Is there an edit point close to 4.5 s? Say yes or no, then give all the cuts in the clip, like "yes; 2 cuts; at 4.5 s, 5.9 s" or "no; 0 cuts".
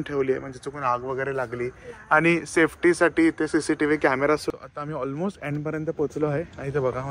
yes; 1 cut; at 4.5 s